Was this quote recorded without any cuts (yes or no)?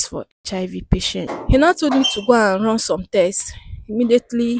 no